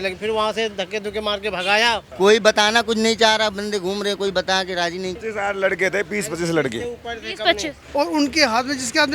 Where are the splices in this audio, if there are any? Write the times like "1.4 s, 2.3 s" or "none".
2.1 s, 5.2 s, 7.8 s